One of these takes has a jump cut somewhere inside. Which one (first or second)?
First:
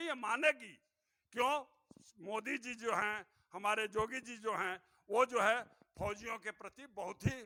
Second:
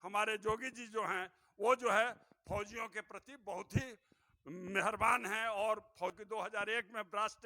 second